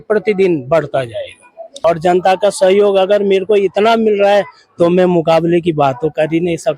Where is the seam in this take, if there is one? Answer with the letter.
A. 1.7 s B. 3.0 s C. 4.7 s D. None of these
A